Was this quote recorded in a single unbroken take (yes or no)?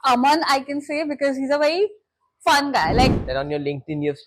no